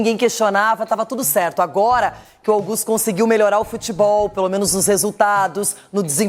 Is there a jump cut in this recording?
no; 0 cuts

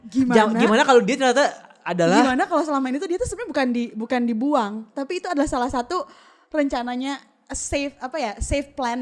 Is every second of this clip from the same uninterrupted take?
yes; 0 cuts

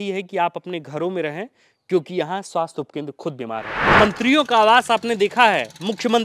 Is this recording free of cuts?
no; 1 cut; at 3.7 s

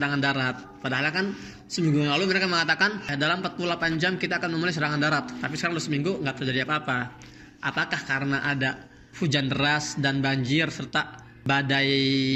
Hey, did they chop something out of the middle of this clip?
no; 0 cuts

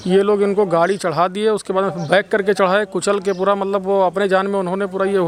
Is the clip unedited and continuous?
yes; 0 cuts

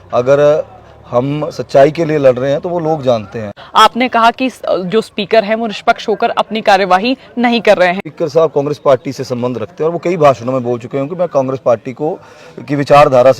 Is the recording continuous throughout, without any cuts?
no; 2 cuts; at 3.6 s, 8.1 s

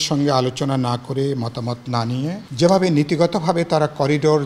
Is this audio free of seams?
no; 1 cut; at 2.4 s

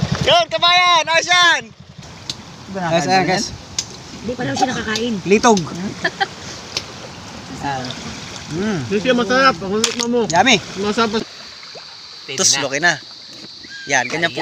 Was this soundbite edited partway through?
yes; 2 cuts; at 2.0 s, 11.2 s

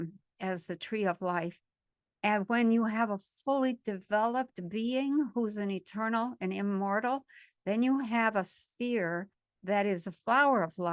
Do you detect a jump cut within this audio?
no; 0 cuts

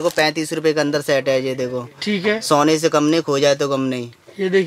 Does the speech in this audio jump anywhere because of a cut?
no; 0 cuts

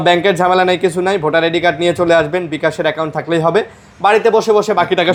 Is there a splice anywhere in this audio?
no; 0 cuts

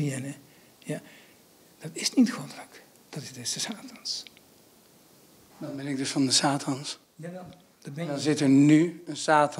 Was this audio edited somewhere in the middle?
no; 0 cuts

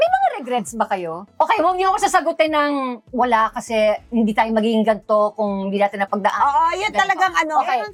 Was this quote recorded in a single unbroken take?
yes; 0 cuts

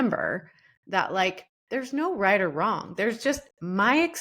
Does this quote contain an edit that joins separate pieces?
yes; 1 cut; at 1.5 s

